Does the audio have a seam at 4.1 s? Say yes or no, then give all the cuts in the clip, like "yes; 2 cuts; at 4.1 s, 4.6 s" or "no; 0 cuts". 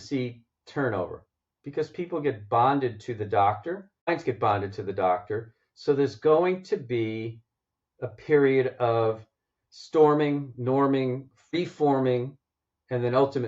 yes; 2 cuts; at 4.1 s, 11.6 s